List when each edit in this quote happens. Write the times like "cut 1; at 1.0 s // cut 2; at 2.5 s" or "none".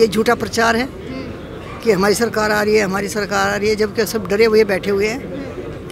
none